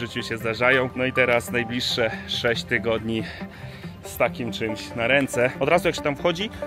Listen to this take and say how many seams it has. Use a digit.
1